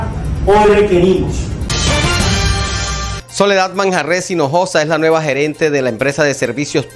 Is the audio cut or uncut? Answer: cut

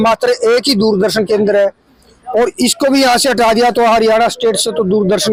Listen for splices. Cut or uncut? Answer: uncut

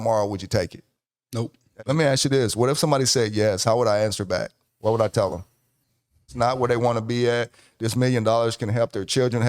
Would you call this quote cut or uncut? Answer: cut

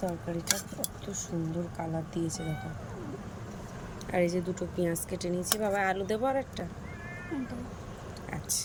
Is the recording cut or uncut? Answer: uncut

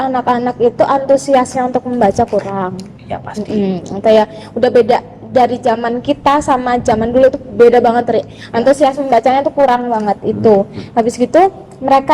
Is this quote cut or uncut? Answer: uncut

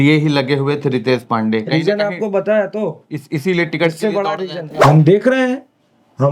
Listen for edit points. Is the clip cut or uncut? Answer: cut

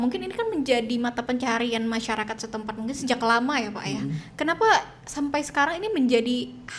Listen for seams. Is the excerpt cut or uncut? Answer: uncut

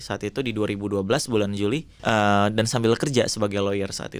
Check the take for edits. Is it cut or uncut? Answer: cut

